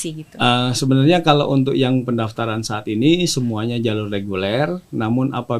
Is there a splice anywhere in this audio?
no; 0 cuts

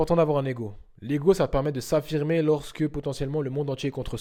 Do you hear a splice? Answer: no; 0 cuts

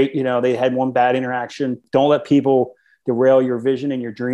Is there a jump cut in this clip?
yes; 1 cut; at 1.8 s

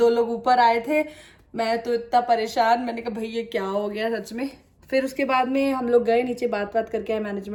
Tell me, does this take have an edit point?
no; 0 cuts

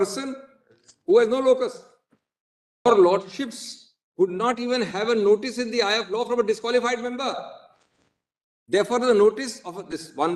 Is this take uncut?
no; 1 cut; at 2.9 s

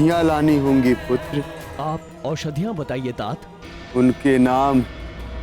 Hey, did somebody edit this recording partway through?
yes; 1 cut; at 1.6 s

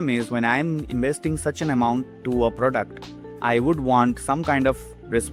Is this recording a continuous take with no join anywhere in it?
yes; 0 cuts

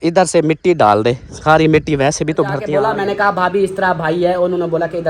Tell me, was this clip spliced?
yes; 1 cut; at 2.7 s

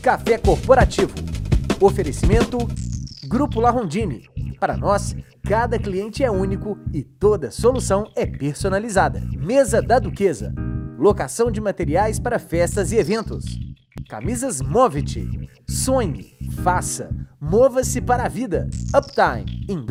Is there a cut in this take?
no; 0 cuts

